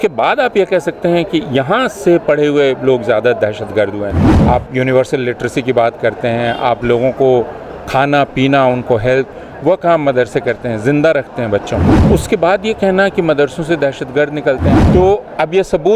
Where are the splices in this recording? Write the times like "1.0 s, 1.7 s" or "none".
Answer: 4.3 s, 12.0 s, 14.8 s